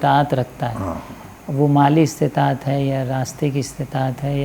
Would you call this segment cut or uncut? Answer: uncut